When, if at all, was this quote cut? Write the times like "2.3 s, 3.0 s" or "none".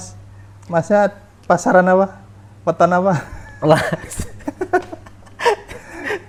none

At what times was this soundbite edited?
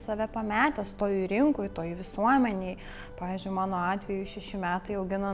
none

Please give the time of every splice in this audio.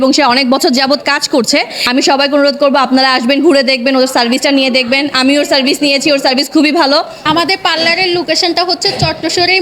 1.8 s, 7.3 s

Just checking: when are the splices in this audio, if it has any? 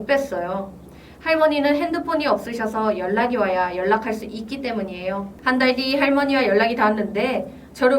5.3 s

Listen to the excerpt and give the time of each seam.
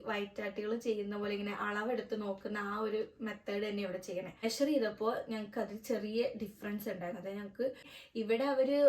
4.3 s, 7.9 s

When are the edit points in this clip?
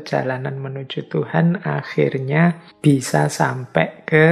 2.7 s

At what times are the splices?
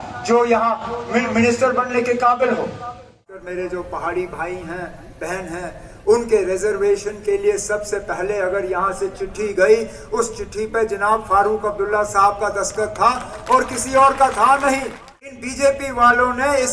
3.2 s, 15.5 s

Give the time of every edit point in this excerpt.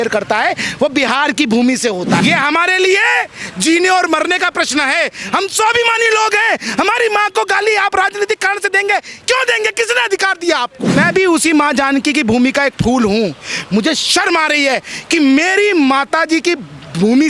2.2 s, 11.0 s

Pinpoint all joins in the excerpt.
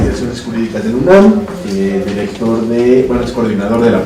none

